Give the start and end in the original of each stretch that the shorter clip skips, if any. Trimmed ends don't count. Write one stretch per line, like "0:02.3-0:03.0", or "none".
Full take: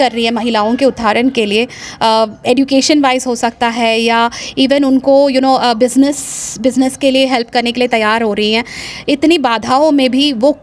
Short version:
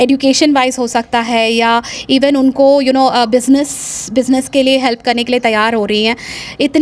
none